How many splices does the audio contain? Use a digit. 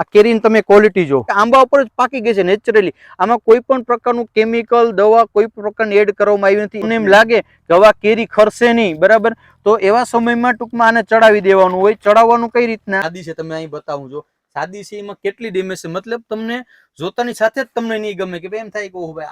3